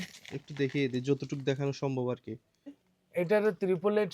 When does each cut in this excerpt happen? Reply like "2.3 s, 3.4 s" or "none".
2.9 s

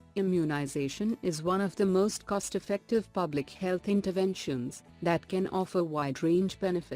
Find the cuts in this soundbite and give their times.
0.9 s, 4.8 s

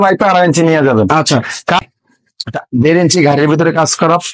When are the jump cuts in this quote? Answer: 1.8 s

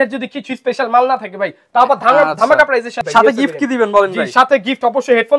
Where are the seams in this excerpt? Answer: 3.0 s

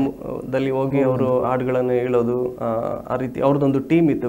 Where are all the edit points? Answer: none

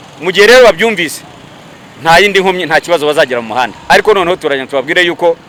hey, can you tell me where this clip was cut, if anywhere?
none

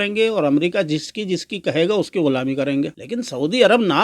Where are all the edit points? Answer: 3.0 s

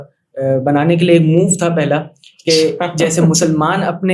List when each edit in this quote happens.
none

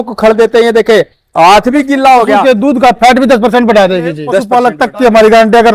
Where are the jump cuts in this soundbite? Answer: 2.4 s, 4.4 s

